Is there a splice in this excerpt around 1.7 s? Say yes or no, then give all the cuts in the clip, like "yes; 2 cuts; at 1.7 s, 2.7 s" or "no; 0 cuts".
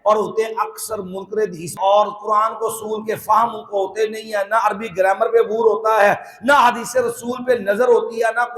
yes; 1 cut; at 1.7 s